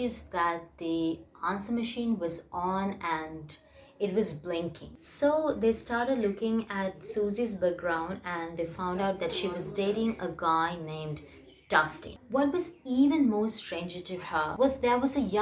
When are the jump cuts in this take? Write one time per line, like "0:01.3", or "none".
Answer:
0:04.8
0:12.1